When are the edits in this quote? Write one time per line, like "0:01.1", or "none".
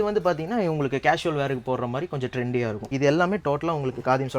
0:02.9